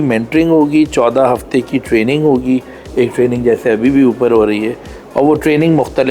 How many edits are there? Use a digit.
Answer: 0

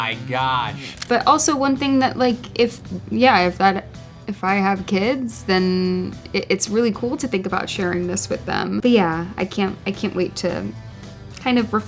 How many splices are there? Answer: 2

